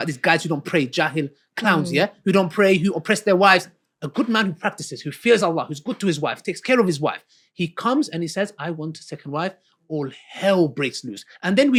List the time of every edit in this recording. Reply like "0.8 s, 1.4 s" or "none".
none